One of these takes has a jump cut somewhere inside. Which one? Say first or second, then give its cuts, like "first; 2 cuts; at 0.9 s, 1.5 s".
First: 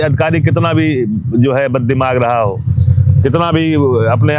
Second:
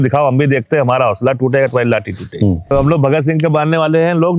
second; 1 cut; at 2.7 s